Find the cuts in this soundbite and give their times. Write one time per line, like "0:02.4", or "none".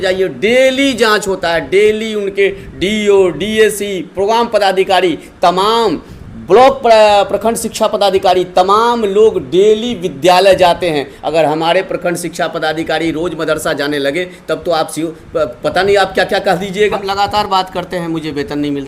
0:17.0